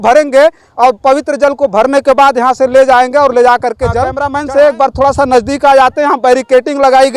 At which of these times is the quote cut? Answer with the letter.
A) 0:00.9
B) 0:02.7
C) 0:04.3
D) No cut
C